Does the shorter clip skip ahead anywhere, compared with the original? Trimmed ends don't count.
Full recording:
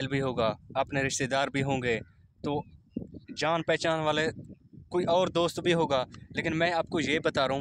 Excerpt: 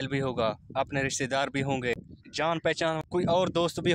yes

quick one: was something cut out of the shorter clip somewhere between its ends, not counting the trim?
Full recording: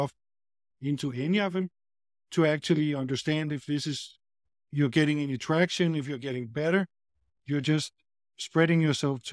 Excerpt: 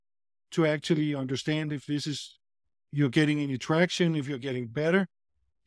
no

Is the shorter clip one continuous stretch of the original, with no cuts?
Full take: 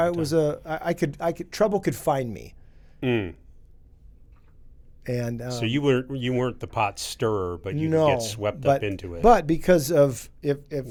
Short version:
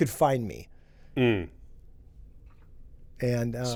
yes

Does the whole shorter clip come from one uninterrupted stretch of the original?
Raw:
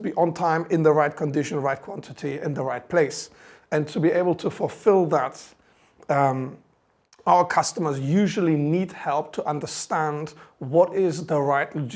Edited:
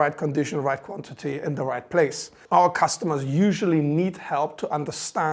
no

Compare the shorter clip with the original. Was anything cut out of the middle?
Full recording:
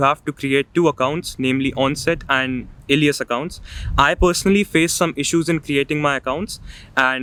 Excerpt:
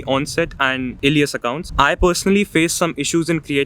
yes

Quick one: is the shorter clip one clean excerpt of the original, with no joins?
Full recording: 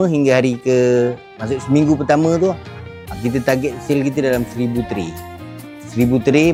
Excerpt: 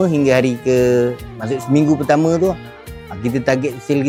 yes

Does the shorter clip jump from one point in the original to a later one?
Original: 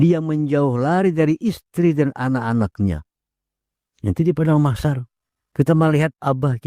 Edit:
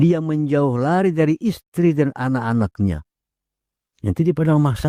no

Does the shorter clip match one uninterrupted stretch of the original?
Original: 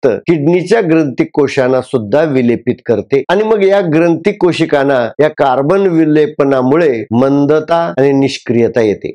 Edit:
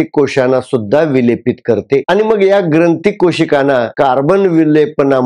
no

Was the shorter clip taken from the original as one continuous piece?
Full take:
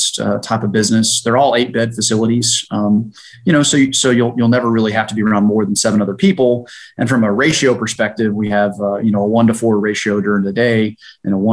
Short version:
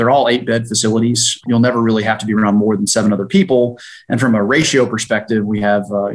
no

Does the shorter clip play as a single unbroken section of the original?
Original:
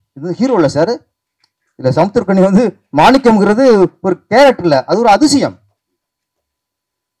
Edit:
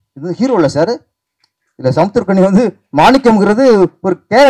yes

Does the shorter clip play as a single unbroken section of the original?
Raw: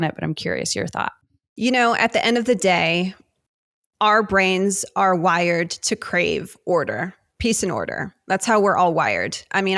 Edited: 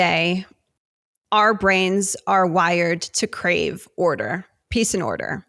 yes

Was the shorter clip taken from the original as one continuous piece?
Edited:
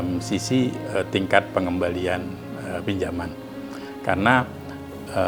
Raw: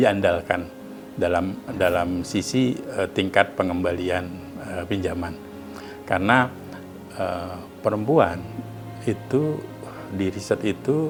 yes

